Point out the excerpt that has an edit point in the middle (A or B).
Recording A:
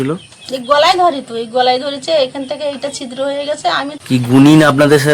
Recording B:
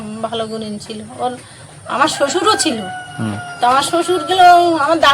A